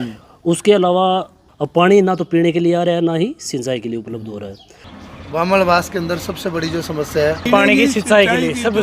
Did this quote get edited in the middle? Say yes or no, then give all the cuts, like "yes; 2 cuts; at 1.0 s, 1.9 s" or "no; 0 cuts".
yes; 3 cuts; at 1.4 s, 4.8 s, 7.5 s